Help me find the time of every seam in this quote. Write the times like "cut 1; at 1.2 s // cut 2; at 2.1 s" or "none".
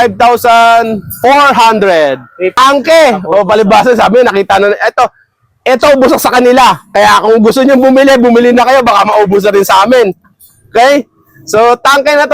cut 1; at 2.6 s